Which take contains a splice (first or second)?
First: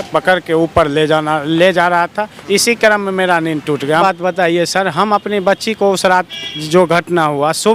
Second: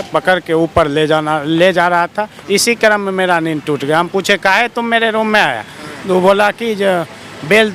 first